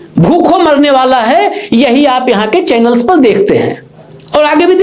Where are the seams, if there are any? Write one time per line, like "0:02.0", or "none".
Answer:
none